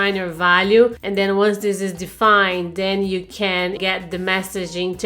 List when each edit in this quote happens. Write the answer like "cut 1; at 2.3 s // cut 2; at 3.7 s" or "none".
cut 1; at 1.0 s // cut 2; at 3.8 s